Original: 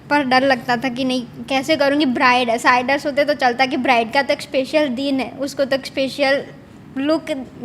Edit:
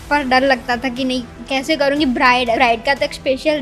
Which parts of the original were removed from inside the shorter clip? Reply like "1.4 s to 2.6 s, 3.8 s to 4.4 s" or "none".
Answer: 2.6 s to 3.9 s